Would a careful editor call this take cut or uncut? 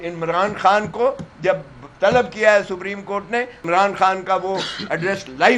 cut